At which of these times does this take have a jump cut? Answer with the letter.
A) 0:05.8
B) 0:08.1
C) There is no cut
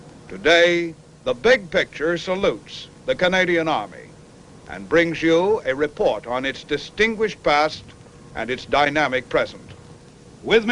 A